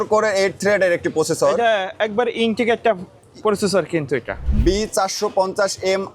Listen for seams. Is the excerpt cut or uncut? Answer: cut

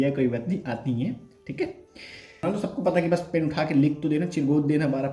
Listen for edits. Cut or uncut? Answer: cut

